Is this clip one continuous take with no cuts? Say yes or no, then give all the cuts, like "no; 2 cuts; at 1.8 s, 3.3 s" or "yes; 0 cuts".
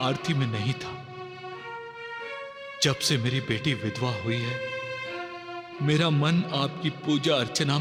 yes; 0 cuts